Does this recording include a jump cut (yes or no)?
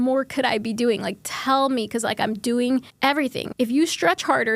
yes